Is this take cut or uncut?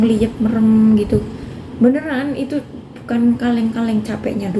uncut